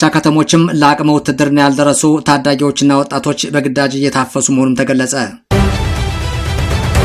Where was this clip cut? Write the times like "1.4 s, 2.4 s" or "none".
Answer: 5.4 s